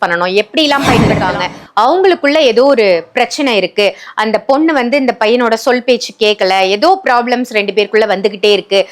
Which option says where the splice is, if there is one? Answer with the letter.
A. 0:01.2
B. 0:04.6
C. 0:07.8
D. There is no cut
A